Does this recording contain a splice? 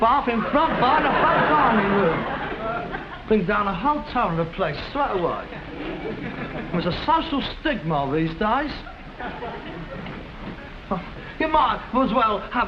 no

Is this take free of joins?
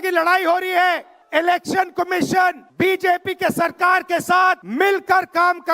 no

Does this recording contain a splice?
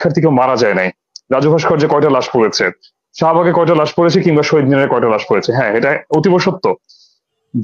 no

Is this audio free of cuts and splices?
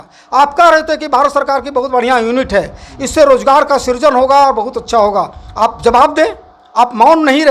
yes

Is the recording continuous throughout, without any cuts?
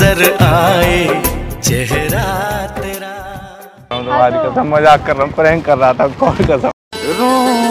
no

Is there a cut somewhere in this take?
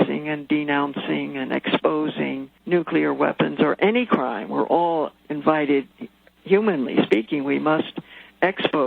yes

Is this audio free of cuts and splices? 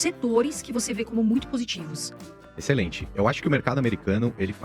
yes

